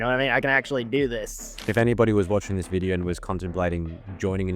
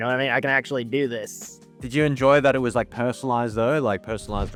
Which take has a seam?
first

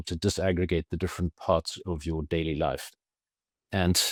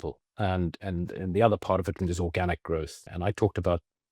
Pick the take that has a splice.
second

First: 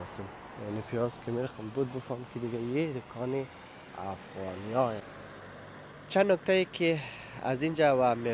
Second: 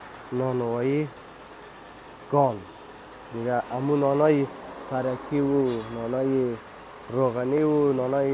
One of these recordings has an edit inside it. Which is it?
first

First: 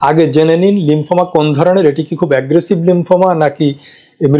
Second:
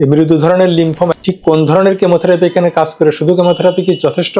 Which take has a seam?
second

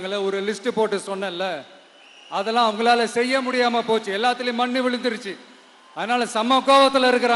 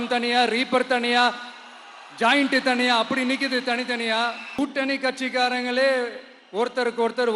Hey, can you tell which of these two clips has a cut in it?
second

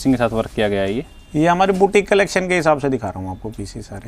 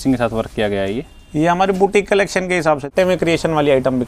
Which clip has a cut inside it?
second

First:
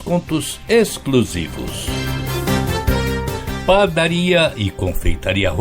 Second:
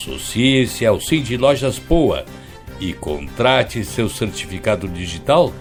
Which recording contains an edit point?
first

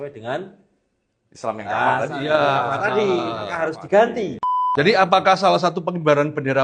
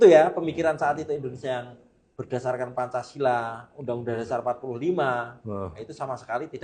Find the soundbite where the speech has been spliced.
first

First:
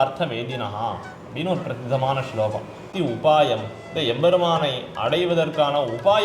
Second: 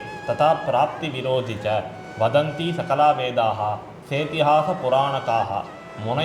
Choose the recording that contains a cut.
first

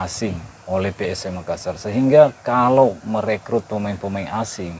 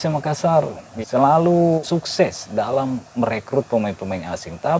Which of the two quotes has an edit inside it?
second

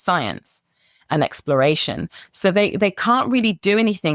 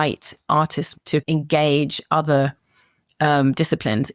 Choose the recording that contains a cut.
second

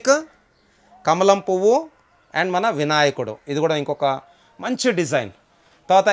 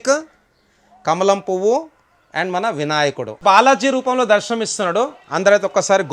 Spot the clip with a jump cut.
second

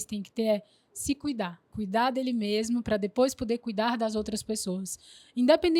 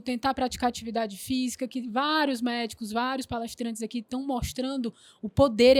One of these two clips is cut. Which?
first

